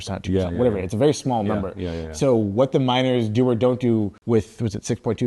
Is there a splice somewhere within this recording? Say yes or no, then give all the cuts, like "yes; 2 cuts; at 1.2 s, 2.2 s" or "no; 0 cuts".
yes; 1 cut; at 4.2 s